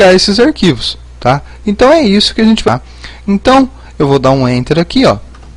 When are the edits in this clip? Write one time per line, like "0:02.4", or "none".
0:02.6